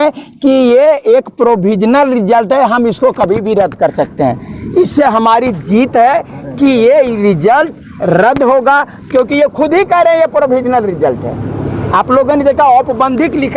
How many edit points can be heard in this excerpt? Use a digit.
0